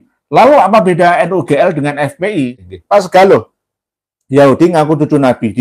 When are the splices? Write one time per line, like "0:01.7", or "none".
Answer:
0:02.6